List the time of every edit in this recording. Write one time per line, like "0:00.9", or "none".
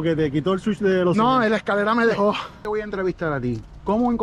0:02.7